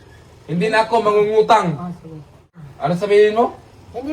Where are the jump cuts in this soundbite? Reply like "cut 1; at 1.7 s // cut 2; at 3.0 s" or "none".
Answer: cut 1; at 2.3 s